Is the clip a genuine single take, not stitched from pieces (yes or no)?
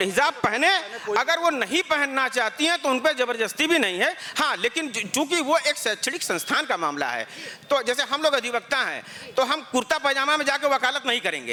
yes